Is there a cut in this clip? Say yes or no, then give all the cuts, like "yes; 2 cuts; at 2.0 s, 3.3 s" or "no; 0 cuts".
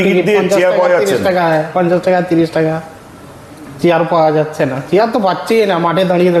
no; 0 cuts